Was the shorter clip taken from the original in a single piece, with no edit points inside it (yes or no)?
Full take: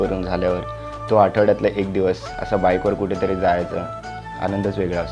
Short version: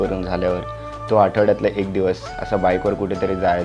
yes